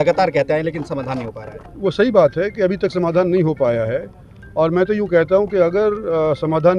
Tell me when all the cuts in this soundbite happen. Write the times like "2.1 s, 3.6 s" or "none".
none

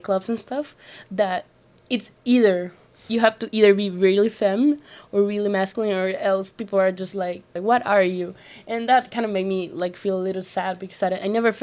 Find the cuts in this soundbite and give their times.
7.5 s

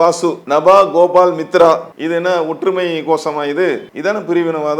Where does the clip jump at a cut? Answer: 1.9 s, 3.9 s

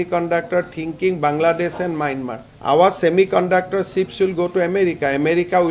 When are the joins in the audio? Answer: none

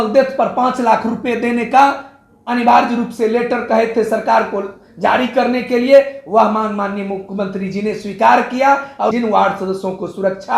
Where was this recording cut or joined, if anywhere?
9.1 s

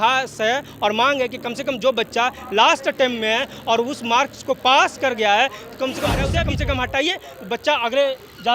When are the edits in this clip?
6.3 s

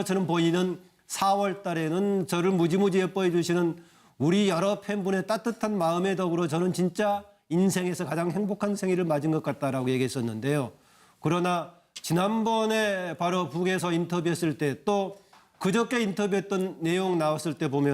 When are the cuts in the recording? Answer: 16.3 s

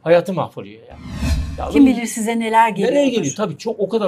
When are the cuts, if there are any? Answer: none

